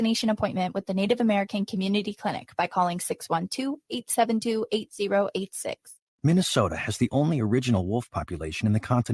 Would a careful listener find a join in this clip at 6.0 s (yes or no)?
yes